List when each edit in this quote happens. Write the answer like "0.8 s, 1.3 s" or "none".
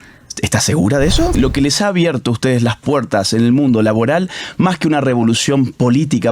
1.4 s